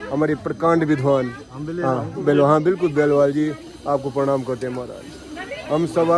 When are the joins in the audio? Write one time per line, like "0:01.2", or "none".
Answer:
none